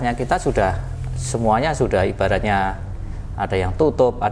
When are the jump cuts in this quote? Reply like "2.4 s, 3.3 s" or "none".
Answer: none